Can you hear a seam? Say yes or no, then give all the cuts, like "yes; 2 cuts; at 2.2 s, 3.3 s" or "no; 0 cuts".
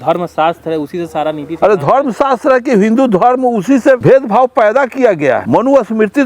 yes; 2 cuts; at 4.0 s, 5.4 s